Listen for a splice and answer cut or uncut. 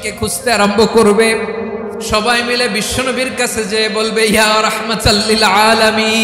cut